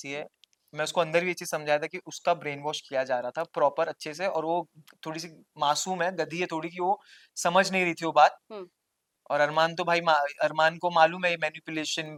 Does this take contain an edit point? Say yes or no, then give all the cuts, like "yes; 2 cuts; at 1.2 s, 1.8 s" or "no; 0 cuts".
no; 0 cuts